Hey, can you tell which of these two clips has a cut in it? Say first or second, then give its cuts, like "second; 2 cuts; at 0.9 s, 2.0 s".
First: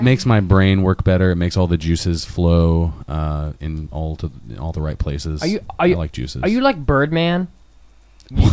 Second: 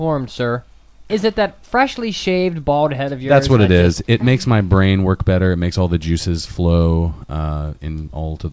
second; 1 cut; at 1.1 s